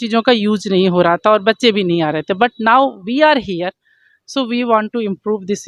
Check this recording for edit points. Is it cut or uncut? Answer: uncut